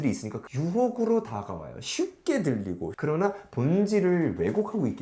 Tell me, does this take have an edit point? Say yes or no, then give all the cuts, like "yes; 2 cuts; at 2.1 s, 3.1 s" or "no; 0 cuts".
yes; 1 cut; at 2.9 s